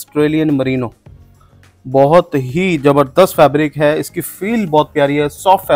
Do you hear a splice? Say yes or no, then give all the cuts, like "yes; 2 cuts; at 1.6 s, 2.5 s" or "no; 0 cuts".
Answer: no; 0 cuts